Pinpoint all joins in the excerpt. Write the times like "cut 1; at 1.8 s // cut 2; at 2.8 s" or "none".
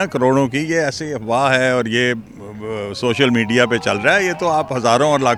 none

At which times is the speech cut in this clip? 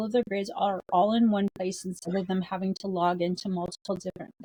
none

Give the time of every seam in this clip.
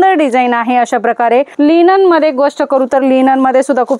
cut 1; at 1.5 s

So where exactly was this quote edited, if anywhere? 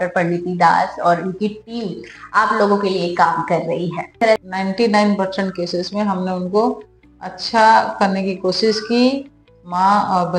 cut 1; at 4.4 s

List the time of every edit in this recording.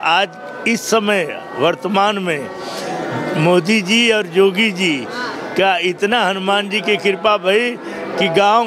none

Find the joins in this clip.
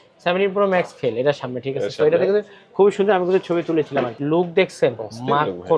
cut 1; at 4.2 s

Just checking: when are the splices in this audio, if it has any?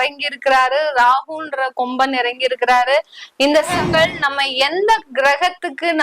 cut 1; at 3.7 s

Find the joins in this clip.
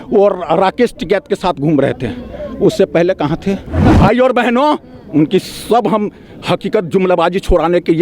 cut 1; at 3.9 s

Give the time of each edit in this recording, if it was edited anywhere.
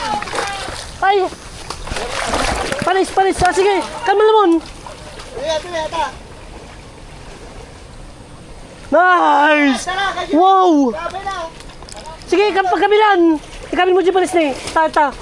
none

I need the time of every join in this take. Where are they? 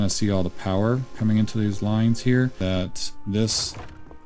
cut 1; at 2.6 s

